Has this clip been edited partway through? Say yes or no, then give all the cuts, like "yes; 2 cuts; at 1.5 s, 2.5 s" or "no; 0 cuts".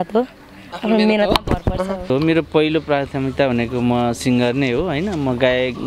yes; 1 cut; at 2.1 s